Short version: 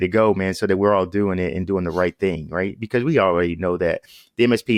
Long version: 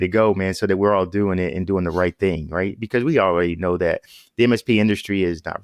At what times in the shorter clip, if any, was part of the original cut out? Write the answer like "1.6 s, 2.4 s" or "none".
none